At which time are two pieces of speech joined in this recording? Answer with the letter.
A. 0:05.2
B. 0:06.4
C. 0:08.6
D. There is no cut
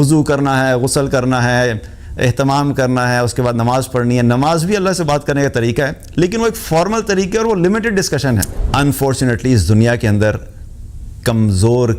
C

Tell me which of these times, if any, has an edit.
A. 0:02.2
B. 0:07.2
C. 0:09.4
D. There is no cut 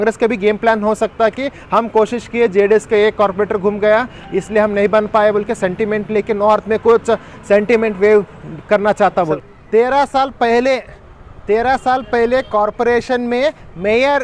C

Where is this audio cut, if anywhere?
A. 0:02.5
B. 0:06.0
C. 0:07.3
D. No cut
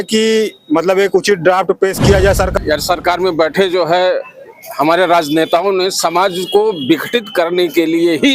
A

